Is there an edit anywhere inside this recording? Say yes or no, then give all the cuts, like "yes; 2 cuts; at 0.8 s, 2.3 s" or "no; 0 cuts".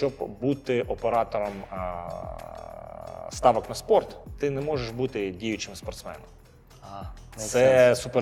no; 0 cuts